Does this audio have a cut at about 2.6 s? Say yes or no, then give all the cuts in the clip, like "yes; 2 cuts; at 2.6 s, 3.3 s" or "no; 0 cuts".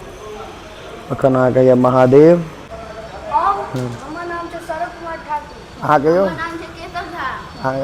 yes; 1 cut; at 2.6 s